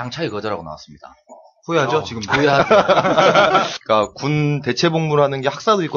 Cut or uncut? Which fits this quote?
cut